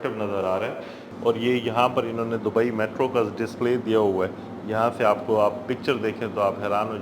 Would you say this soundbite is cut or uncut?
cut